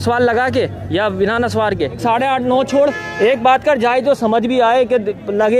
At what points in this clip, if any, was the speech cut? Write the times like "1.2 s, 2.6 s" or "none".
2.0 s